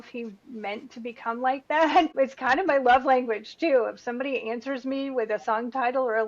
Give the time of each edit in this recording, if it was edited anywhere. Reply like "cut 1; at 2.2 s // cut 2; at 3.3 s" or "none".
cut 1; at 2.1 s